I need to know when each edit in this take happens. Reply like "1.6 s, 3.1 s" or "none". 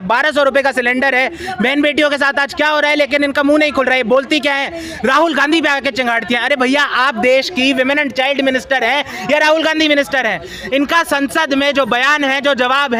none